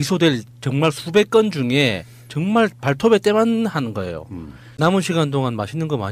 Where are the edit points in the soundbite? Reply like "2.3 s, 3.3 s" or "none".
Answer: 4.7 s